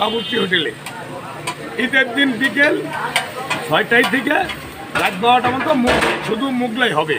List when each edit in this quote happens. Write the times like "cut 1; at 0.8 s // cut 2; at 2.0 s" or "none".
none